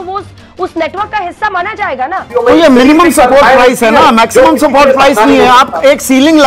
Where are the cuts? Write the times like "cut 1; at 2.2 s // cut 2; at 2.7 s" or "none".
cut 1; at 2.2 s